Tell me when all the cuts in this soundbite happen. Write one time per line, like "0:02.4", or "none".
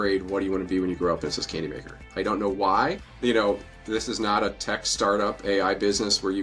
0:03.1